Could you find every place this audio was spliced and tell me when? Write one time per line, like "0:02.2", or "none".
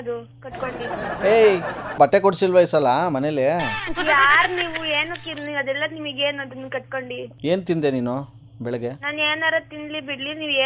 0:02.0
0:07.3